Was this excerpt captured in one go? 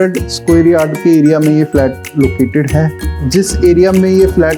no; 1 cut; at 3.1 s

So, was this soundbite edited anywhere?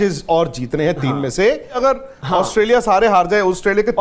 yes; 1 cut; at 1.8 s

